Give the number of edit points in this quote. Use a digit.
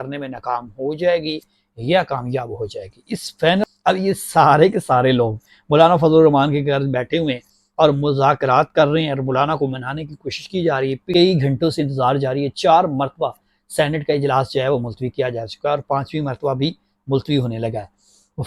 2